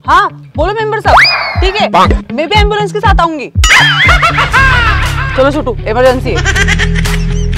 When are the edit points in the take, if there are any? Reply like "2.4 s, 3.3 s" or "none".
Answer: none